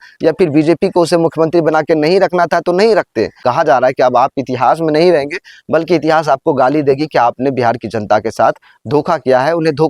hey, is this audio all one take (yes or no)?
no